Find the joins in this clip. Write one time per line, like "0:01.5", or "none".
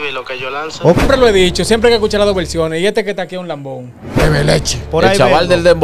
0:01.0
0:04.0